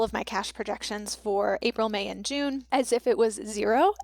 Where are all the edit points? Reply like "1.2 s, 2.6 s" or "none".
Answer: 2.6 s